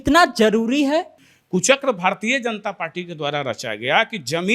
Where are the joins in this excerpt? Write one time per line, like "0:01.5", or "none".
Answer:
0:01.1